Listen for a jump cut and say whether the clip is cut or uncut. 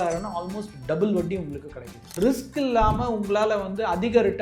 cut